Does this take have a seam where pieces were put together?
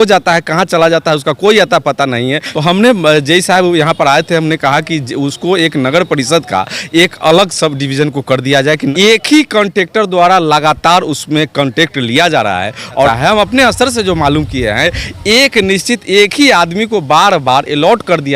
yes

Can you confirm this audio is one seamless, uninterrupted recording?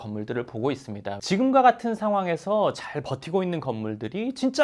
no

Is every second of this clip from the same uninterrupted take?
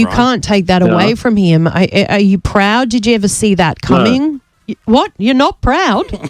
yes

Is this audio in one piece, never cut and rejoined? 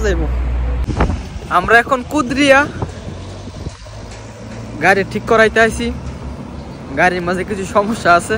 no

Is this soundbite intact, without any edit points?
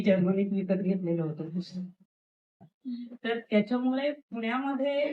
no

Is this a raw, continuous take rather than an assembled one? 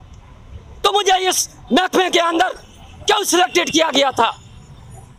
yes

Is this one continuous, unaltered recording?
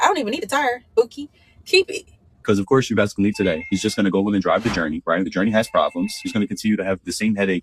no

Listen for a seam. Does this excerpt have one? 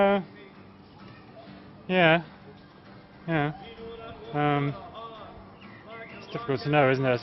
yes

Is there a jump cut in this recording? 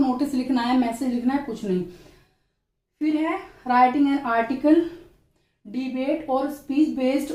no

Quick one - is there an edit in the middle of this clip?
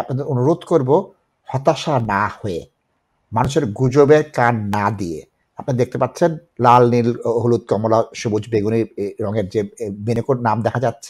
no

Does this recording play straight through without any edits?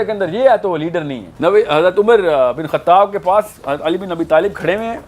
no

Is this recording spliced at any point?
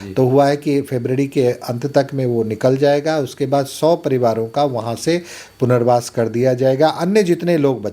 no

